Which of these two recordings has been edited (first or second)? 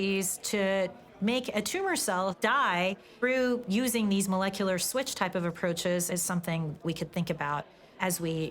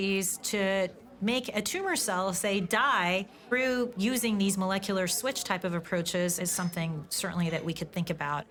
first